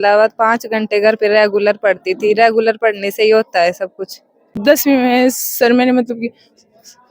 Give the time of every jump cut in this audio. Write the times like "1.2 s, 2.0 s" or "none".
4.5 s